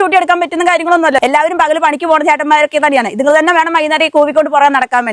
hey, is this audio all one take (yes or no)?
no